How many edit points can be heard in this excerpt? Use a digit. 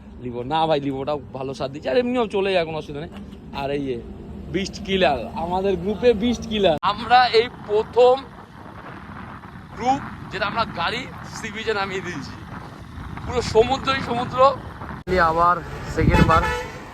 2